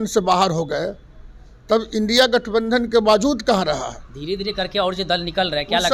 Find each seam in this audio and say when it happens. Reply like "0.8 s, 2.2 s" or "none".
none